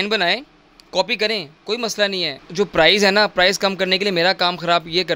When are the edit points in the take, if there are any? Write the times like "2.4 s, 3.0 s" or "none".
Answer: 2.4 s